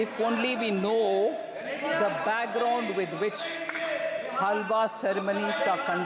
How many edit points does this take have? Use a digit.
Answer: 0